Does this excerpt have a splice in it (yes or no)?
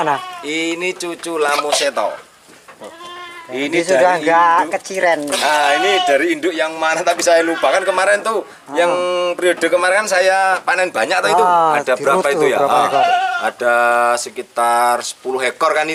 no